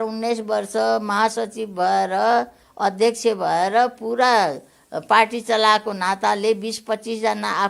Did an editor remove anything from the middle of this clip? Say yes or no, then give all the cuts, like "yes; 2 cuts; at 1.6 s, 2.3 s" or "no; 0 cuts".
no; 0 cuts